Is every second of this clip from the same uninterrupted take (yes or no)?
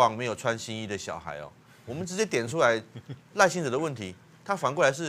yes